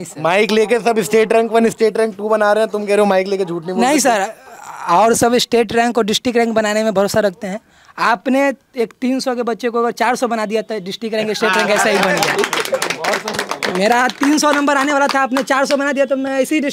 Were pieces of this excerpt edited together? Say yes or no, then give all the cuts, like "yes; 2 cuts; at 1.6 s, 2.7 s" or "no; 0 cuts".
no; 0 cuts